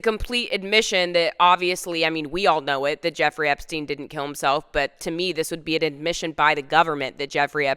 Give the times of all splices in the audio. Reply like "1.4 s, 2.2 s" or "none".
none